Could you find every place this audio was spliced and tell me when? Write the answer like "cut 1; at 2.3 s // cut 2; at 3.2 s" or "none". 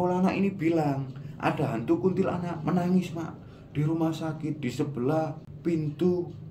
cut 1; at 5.5 s